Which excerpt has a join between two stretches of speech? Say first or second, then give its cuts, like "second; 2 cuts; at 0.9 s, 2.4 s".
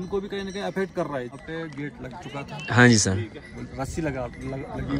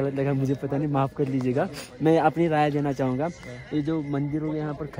first; 1 cut; at 1.4 s